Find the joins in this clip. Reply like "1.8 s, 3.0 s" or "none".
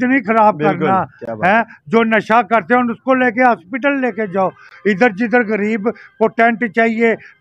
none